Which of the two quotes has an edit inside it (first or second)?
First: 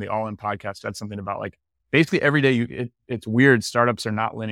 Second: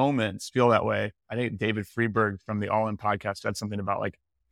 second